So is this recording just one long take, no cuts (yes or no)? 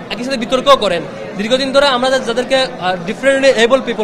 yes